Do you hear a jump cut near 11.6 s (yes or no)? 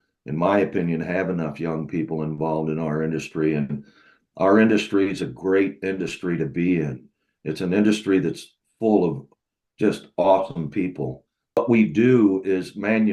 yes